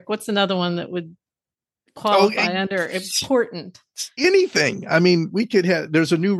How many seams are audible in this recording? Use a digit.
0